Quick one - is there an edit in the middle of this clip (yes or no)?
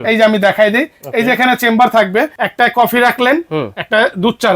yes